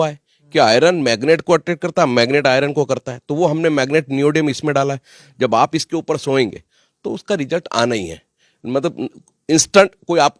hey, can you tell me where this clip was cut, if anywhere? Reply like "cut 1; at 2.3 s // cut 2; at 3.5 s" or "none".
none